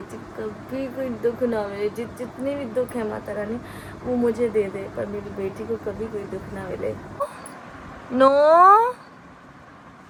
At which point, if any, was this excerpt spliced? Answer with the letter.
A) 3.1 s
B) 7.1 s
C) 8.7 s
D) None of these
D